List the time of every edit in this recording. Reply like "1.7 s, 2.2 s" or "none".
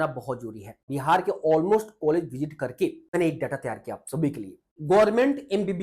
0.9 s, 3.1 s, 4.7 s